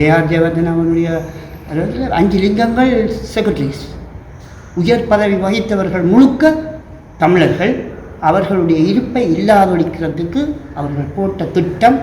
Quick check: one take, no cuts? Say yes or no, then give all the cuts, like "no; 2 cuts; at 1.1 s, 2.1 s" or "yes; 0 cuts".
yes; 0 cuts